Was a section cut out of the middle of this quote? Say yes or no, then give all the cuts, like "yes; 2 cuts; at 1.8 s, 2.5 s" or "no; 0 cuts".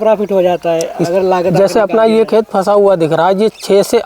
no; 0 cuts